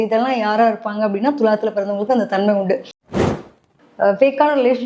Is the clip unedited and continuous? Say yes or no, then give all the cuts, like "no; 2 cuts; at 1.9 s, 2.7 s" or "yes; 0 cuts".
no; 1 cut; at 3.2 s